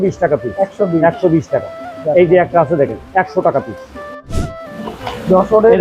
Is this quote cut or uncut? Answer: cut